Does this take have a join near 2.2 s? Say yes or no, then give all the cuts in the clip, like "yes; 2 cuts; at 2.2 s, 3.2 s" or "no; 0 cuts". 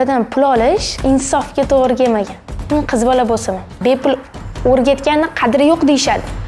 no; 2 cuts; at 0.9 s, 3.8 s